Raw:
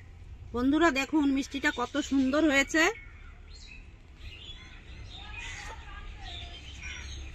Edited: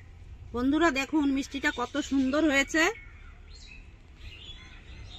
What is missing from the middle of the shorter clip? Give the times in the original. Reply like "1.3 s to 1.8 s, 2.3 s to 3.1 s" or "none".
none